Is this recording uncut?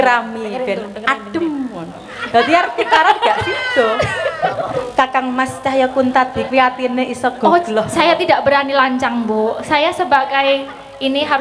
no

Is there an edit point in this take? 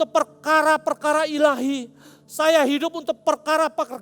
no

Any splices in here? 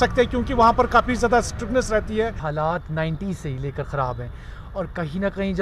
yes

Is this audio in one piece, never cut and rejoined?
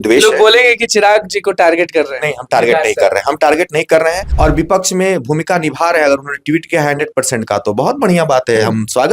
no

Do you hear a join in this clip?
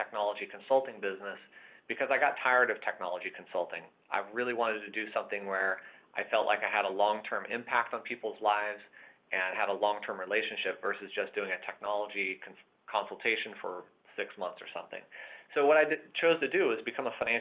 no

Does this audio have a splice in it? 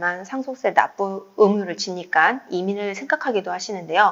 no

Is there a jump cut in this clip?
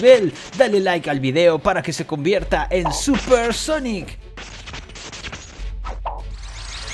no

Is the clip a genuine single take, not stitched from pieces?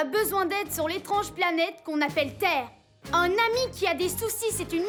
yes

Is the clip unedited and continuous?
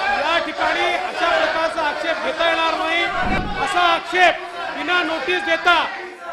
no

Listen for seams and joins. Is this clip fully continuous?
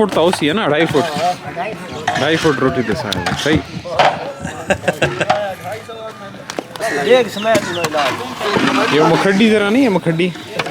yes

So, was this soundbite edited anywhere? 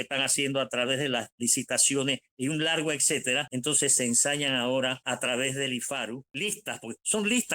yes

